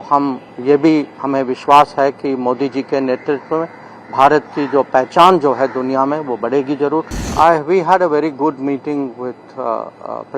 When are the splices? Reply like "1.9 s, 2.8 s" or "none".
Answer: 7.3 s